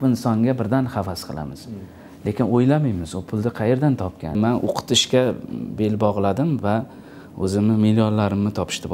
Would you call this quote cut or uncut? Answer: cut